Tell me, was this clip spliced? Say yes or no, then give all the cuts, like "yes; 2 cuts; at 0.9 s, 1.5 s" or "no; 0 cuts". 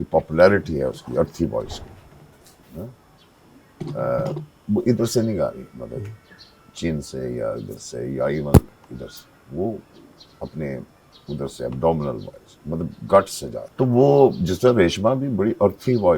no; 0 cuts